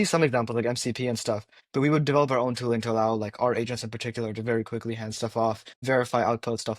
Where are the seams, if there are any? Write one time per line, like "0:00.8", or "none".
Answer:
0:01.5
0:05.7